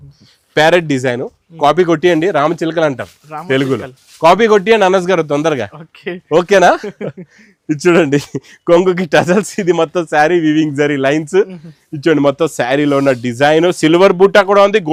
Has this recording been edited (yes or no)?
no